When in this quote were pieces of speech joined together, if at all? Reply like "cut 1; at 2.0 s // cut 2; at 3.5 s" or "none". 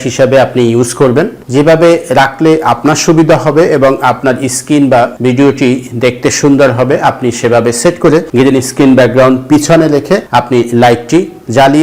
cut 1; at 1.4 s // cut 2; at 5.1 s // cut 3; at 8.3 s // cut 4; at 10.3 s